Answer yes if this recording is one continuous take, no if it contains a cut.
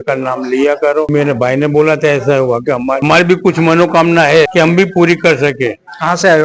yes